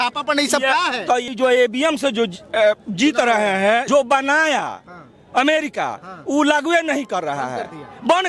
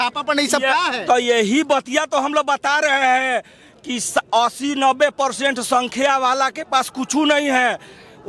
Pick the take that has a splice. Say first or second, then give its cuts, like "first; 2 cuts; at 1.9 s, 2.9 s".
first; 2 cuts; at 1.3 s, 3.8 s